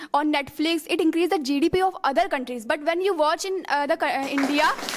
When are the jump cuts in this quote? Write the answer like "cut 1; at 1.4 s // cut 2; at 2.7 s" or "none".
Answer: none